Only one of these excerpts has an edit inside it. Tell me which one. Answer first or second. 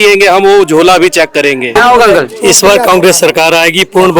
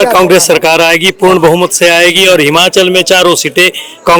first